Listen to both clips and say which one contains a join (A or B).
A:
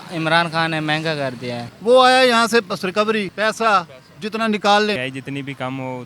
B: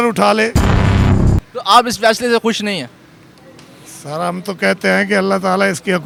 A